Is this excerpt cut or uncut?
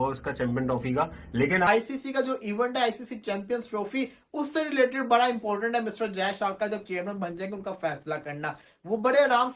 cut